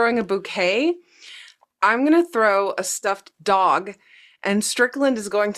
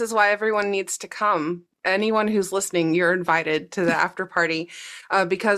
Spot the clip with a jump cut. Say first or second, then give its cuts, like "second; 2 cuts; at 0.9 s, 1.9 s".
second; 1 cut; at 1.7 s